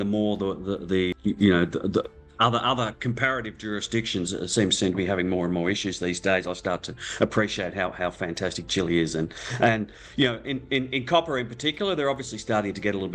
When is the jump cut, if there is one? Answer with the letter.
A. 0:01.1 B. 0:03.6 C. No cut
A